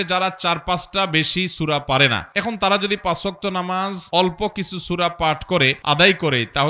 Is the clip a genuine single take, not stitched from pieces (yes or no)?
no